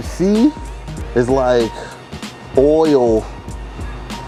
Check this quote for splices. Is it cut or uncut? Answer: uncut